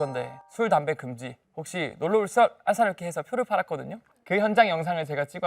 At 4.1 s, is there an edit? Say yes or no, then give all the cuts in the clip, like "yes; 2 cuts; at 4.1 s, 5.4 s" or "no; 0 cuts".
yes; 1 cut; at 4.1 s